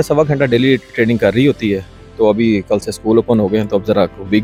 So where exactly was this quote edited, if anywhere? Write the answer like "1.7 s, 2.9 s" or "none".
none